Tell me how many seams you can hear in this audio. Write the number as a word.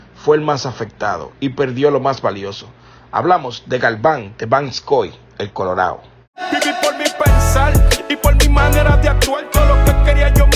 one